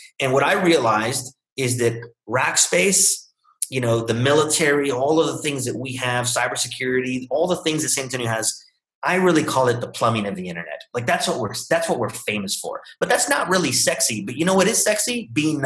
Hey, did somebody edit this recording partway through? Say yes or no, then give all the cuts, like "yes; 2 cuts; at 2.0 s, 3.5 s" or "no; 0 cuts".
no; 0 cuts